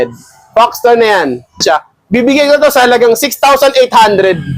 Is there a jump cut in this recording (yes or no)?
yes